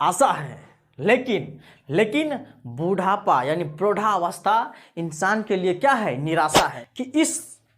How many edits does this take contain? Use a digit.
1